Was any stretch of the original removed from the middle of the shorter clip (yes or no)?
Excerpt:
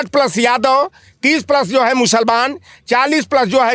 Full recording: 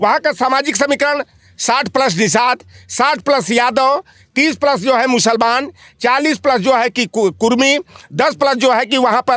no